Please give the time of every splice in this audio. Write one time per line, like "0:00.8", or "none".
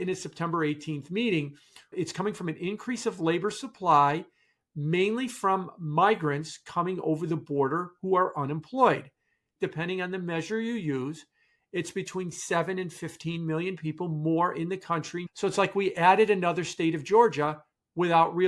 0:01.8
0:09.5
0:15.2